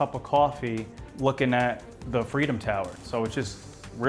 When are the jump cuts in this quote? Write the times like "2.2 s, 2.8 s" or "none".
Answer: 3.0 s